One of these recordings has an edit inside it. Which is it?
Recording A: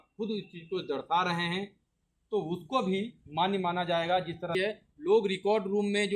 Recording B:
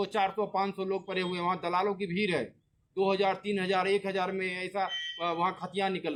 A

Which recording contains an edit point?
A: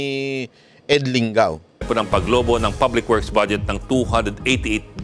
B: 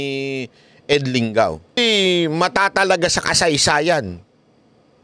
B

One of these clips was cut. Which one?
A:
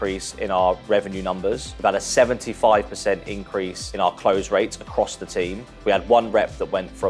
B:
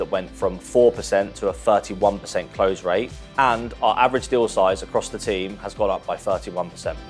A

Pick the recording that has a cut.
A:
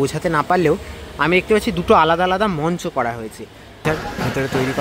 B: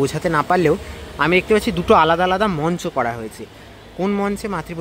A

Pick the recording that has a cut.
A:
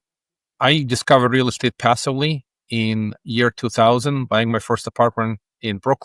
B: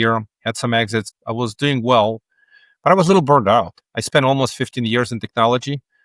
B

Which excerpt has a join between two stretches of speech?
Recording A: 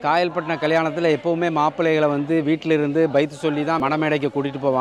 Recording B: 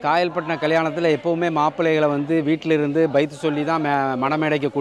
A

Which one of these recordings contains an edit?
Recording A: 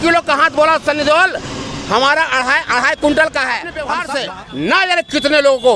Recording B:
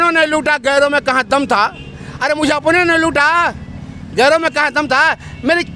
A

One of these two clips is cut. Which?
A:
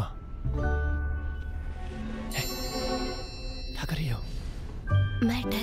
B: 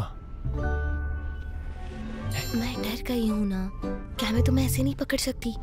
B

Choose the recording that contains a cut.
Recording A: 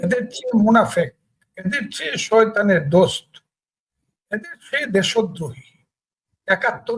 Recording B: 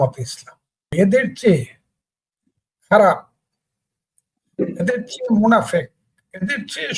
B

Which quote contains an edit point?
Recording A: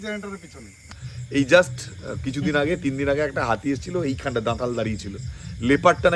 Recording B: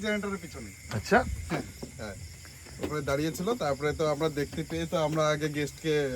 A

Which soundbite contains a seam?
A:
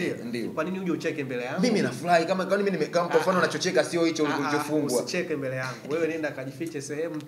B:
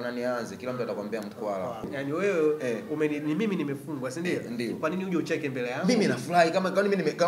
B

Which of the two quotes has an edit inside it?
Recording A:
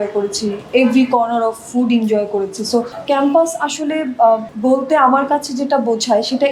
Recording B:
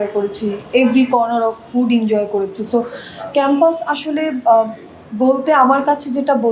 A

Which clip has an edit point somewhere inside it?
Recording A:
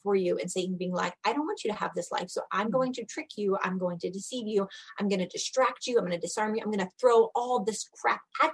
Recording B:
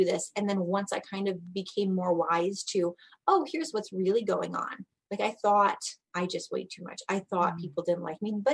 B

